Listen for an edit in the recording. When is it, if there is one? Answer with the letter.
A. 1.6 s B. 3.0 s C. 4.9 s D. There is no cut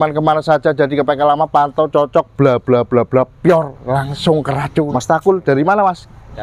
C